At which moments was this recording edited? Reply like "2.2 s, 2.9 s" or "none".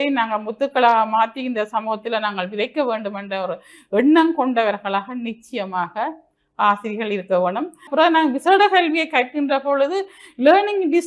7.9 s